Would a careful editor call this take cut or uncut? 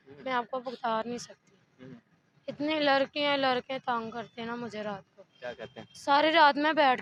uncut